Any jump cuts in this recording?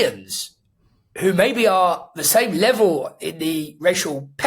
no; 0 cuts

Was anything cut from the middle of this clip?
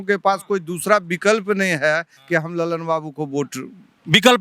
no; 0 cuts

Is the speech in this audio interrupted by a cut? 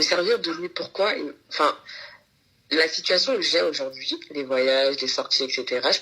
no; 0 cuts

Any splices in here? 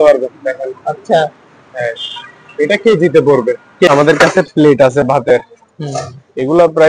yes; 1 cut; at 3.9 s

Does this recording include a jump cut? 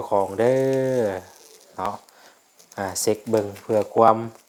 no; 0 cuts

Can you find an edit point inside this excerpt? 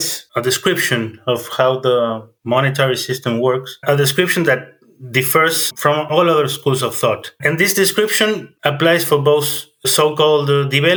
no; 0 cuts

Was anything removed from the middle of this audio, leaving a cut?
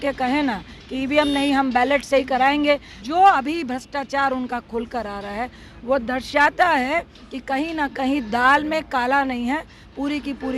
yes; 1 cut; at 3.0 s

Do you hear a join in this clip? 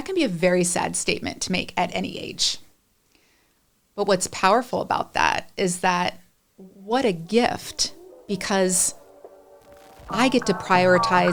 no; 0 cuts

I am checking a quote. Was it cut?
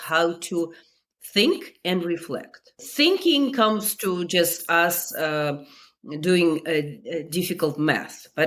yes; 1 cut; at 2.9 s

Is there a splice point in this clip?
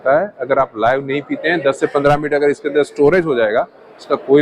no; 0 cuts

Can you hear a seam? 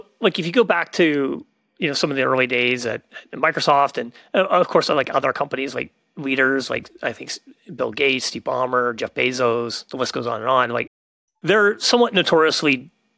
no; 0 cuts

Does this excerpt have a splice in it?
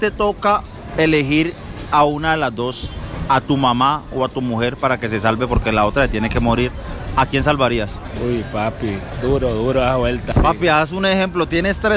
yes; 1 cut; at 10.3 s

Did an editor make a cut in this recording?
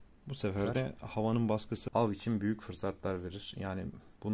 yes; 1 cut; at 1.8 s

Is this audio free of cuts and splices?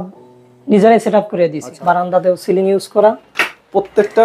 no; 1 cut; at 1.8 s

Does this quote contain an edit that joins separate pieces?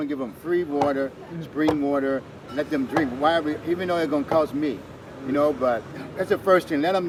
no; 0 cuts

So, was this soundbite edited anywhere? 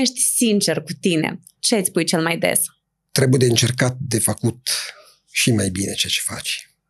no; 0 cuts

